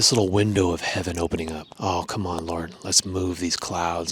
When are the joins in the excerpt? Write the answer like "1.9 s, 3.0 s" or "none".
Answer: 1.7 s